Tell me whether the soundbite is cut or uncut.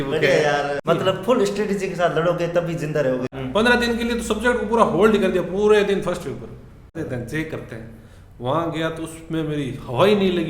cut